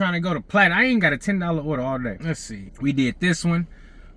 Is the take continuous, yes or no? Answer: yes